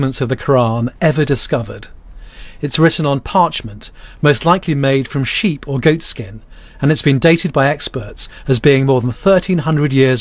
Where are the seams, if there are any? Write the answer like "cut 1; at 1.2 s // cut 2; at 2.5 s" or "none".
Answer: none